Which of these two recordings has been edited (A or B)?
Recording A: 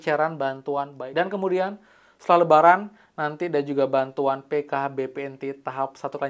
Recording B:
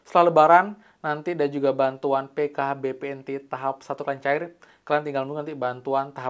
A